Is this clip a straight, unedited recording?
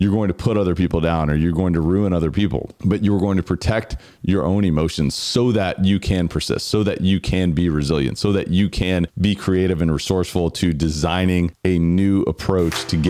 yes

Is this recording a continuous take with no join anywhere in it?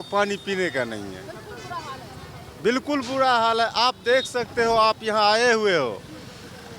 yes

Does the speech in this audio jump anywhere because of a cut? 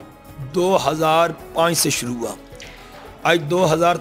no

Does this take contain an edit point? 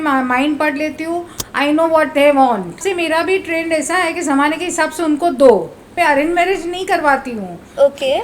yes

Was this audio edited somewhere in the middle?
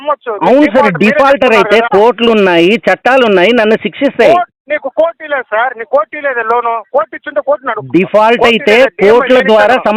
no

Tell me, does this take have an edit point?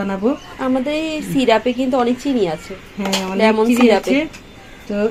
no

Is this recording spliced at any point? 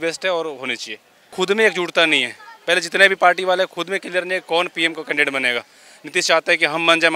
yes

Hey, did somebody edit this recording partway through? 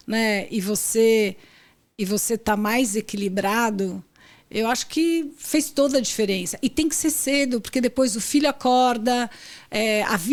no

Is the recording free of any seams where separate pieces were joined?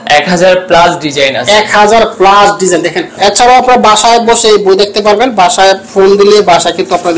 no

